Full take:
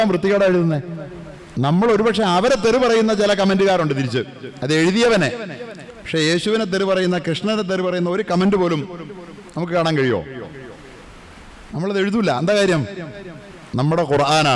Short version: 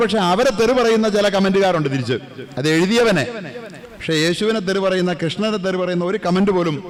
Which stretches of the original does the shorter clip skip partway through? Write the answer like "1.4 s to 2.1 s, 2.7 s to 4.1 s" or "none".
none